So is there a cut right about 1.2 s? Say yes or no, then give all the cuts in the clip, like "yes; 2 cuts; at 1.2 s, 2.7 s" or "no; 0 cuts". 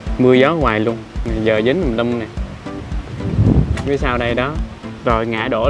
yes; 1 cut; at 1.2 s